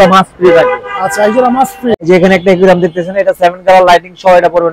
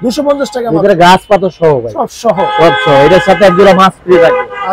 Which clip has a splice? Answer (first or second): first